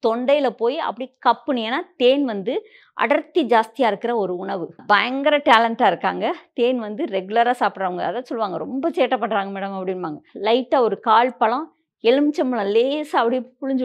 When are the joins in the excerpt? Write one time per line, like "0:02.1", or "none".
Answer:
0:04.8
0:10.3